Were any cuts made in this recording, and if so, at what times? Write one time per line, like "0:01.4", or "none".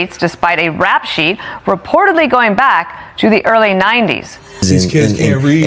0:04.6